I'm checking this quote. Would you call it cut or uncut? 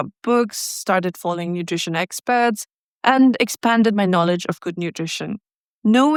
uncut